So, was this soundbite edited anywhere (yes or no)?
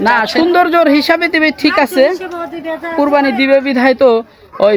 yes